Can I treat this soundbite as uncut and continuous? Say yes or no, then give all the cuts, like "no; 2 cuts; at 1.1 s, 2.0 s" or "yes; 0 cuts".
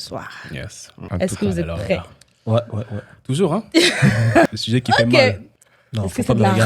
no; 3 cuts; at 1.0 s, 4.5 s, 5.5 s